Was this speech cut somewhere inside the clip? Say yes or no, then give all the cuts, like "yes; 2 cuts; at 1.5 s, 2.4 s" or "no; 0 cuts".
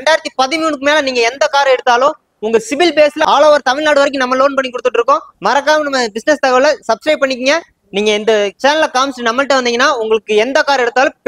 no; 0 cuts